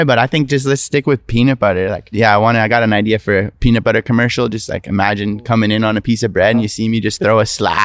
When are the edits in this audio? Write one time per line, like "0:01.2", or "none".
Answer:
0:02.1